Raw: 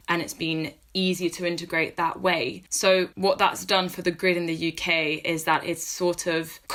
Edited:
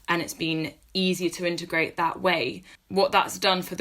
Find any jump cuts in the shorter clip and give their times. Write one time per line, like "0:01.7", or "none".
0:02.8